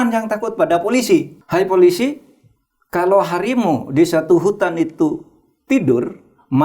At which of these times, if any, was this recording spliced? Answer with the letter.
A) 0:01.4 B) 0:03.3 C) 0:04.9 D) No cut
A